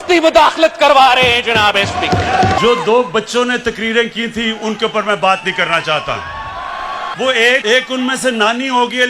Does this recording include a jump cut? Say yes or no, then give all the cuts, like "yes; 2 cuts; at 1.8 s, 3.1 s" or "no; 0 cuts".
yes; 3 cuts; at 2.6 s, 7.1 s, 7.6 s